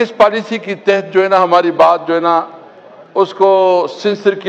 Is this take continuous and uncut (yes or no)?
yes